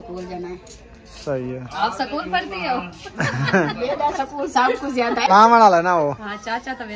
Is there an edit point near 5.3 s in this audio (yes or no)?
yes